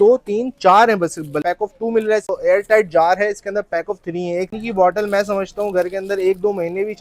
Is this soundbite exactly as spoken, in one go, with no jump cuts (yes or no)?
no